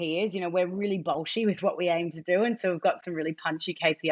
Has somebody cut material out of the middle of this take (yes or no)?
no